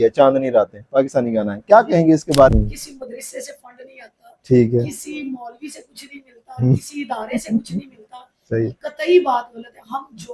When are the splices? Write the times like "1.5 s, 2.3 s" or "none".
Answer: 2.5 s